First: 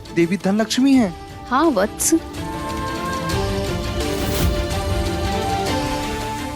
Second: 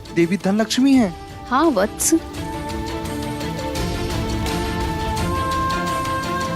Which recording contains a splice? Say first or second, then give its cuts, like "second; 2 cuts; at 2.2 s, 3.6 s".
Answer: first; 2 cuts; at 2.9 s, 5.3 s